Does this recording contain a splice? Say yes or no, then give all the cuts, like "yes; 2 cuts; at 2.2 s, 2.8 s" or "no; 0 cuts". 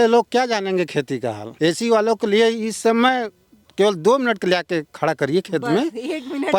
no; 0 cuts